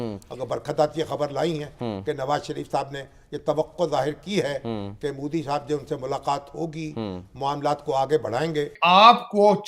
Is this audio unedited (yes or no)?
no